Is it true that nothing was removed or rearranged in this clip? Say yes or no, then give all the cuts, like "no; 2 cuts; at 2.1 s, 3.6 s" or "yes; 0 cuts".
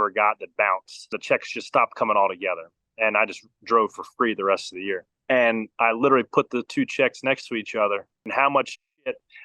no; 3 cuts; at 1.2 s, 5.1 s, 8.3 s